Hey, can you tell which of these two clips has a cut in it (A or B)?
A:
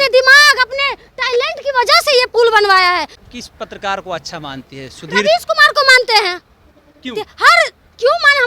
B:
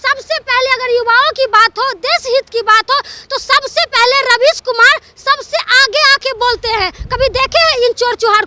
A